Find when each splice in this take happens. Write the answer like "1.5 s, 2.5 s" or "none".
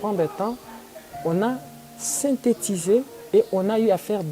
3.2 s